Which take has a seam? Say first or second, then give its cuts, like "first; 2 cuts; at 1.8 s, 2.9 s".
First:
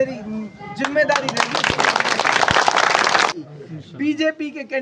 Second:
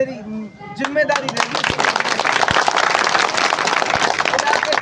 first; 1 cut; at 3.3 s